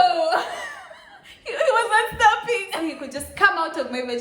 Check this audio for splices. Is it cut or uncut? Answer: cut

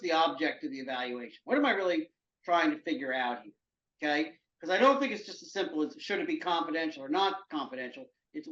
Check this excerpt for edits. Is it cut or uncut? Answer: uncut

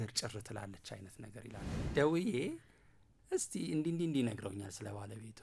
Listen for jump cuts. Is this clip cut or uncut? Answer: cut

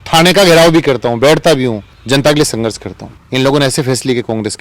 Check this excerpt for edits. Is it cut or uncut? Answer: cut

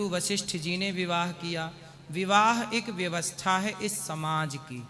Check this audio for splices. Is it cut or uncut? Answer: uncut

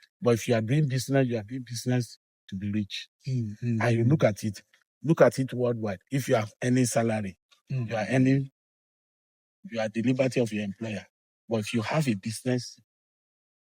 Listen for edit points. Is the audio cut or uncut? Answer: uncut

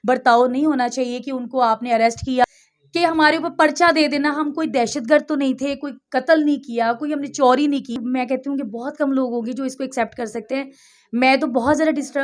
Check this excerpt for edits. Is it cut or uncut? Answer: cut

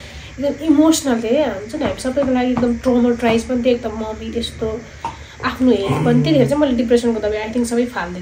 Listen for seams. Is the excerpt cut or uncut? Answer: uncut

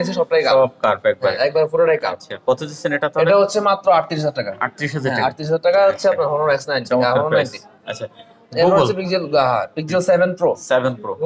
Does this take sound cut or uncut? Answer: uncut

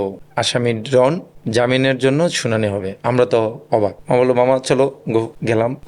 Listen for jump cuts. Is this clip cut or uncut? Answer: uncut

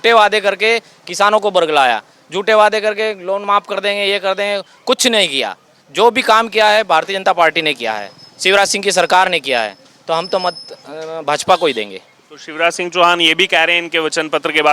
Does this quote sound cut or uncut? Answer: uncut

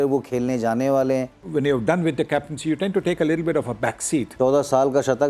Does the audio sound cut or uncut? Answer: cut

